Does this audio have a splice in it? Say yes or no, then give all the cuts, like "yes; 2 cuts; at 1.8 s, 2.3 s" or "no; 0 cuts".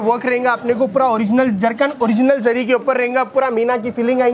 no; 0 cuts